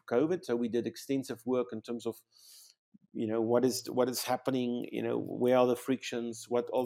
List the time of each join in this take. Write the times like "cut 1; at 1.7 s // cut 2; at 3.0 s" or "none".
none